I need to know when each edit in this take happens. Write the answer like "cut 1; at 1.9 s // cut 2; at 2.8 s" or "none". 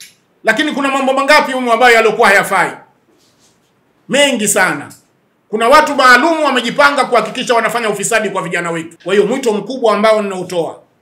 cut 1; at 8.9 s